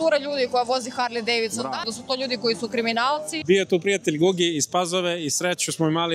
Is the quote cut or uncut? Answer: cut